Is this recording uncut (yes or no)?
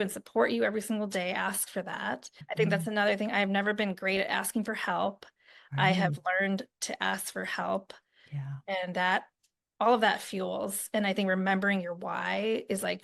no